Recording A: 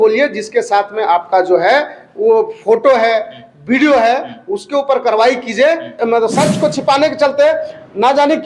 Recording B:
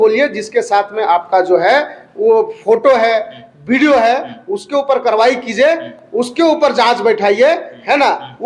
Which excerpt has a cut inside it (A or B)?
A